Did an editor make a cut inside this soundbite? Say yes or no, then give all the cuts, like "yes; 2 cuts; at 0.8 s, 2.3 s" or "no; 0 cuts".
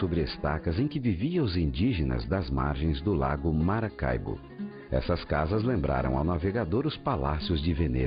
yes; 1 cut; at 5.9 s